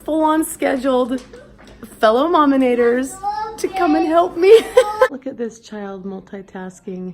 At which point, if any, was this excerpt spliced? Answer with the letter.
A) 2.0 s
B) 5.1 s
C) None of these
B